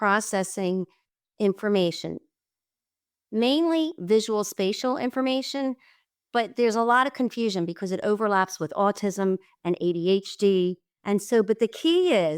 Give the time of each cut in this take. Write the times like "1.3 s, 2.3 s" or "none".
none

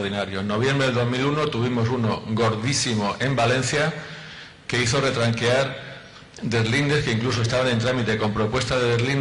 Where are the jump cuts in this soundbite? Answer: 4.1 s

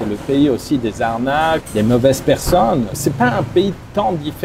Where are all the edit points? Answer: 1.6 s, 2.9 s

